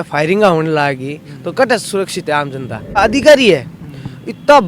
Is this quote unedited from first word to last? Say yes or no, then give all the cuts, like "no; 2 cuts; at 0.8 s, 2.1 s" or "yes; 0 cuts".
no; 1 cut; at 3.0 s